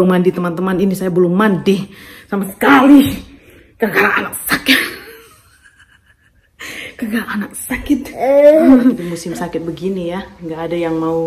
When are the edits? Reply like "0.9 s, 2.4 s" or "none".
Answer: 9.1 s